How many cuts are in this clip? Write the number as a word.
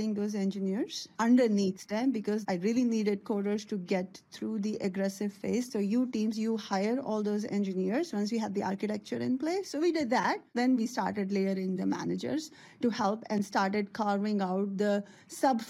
four